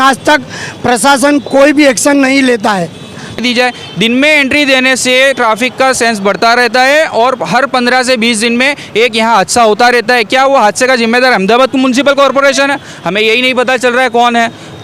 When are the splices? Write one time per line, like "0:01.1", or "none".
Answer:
0:03.4